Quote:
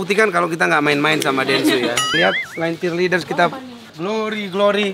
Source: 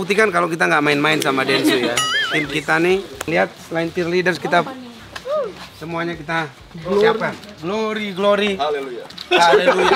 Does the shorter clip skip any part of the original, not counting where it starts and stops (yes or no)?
yes